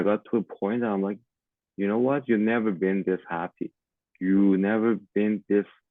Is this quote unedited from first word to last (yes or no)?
yes